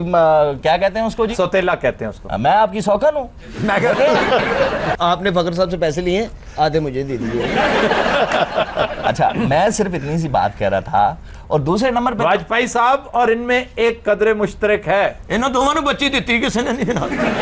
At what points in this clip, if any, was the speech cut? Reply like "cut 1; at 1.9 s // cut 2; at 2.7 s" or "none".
cut 1; at 4.9 s // cut 2; at 11.3 s